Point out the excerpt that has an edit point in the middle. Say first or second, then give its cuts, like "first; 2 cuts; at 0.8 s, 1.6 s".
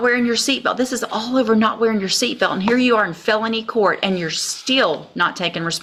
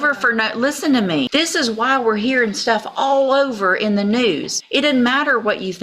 second; 2 cuts; at 1.3 s, 4.5 s